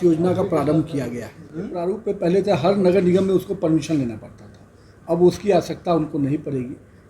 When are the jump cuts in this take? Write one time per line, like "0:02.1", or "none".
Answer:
0:01.7